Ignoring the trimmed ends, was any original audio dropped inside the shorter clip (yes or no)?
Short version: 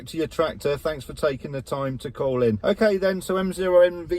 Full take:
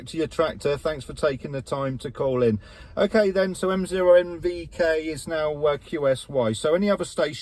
yes